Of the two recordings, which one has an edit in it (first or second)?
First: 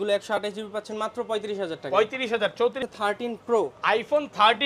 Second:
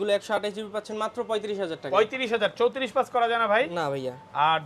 first